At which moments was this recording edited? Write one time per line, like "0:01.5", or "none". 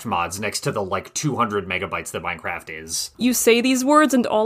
0:03.1

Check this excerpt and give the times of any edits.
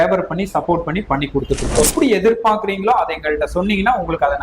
0:01.8

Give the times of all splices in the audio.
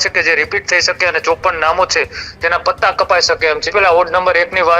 0:03.6

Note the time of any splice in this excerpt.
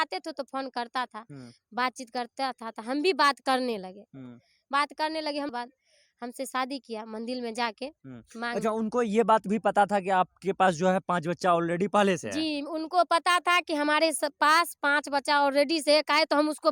0:05.5

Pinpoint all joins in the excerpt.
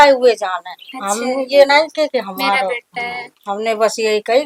none

